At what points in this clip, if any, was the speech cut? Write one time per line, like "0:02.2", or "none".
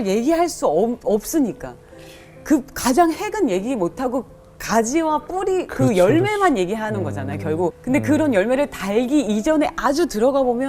0:07.8